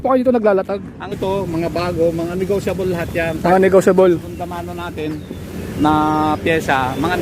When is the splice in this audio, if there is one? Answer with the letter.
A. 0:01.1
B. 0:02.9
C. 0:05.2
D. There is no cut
A